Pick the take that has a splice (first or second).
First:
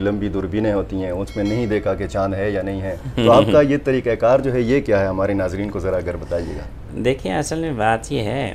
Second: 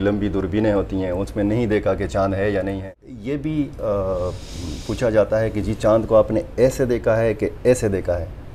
second